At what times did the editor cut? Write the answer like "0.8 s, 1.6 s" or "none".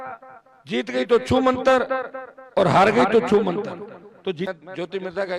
4.5 s